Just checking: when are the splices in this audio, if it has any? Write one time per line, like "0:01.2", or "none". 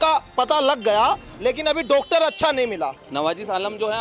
0:03.0